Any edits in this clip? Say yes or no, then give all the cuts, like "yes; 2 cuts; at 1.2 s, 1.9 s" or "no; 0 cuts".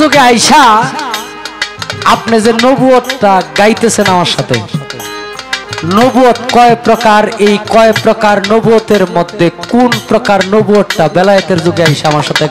no; 0 cuts